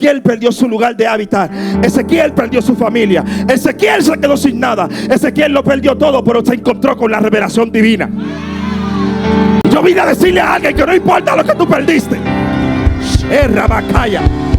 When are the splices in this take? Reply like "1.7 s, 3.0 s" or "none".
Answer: 9.6 s